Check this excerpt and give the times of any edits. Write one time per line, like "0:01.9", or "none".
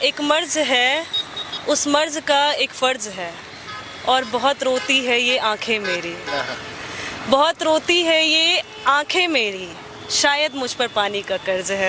none